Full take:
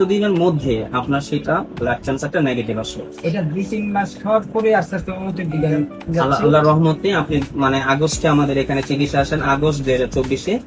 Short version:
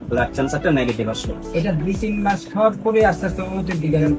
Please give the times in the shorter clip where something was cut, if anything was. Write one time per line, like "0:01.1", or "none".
none